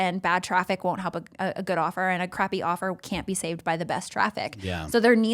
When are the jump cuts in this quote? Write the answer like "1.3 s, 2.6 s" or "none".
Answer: 2.3 s